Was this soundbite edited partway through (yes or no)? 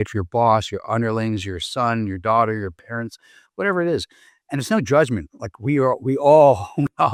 no